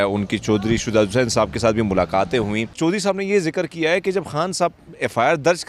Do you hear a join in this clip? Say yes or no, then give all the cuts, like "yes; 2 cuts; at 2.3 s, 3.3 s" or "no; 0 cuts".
yes; 1 cut; at 2.7 s